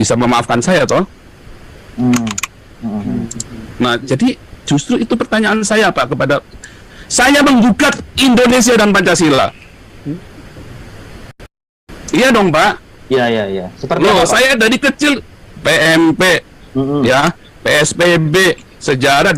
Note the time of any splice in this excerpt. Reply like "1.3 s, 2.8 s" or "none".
none